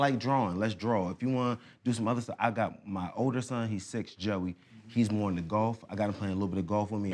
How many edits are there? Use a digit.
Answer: 0